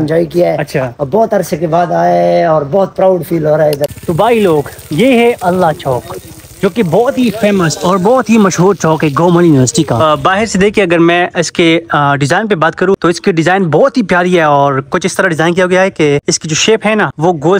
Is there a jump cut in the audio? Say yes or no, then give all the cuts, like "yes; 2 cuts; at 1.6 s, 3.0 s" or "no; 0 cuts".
yes; 2 cuts; at 3.9 s, 10.0 s